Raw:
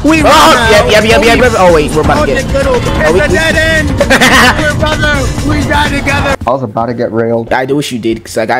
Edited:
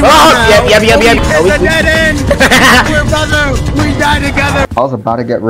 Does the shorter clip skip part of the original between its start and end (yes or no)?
yes